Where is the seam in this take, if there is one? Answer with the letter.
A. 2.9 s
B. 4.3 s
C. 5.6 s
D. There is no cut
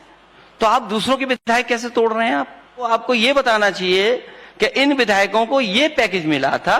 A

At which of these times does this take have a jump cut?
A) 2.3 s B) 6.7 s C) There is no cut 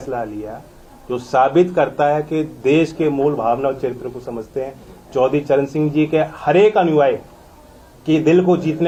C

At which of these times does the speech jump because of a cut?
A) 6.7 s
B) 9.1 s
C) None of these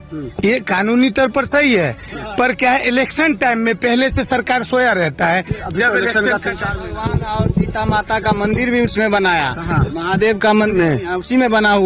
A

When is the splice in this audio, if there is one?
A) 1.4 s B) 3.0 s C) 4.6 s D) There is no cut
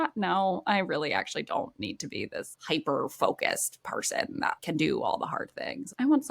C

